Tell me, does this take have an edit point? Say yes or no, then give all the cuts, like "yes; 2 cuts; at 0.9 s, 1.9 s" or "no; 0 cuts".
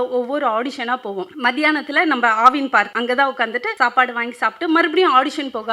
yes; 3 cuts; at 1.3 s, 2.9 s, 3.7 s